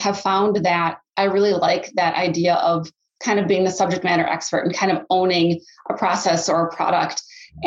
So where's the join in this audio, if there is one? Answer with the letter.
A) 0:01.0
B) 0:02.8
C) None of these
A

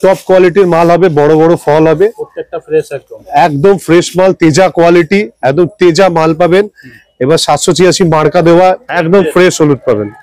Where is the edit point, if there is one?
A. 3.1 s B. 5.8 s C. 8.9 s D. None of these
C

